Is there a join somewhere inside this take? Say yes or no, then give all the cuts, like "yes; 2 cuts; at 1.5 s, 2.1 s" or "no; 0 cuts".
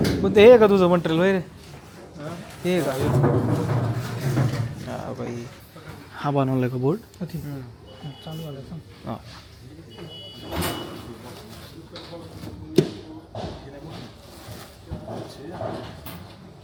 no; 0 cuts